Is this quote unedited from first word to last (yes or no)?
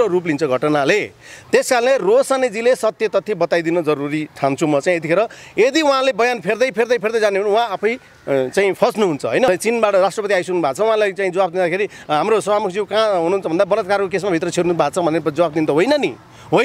no